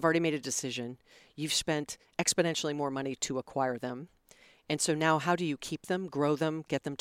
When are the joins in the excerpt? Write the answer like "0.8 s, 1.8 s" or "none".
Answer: none